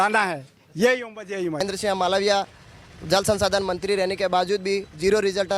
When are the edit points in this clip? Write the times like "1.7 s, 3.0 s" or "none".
1.6 s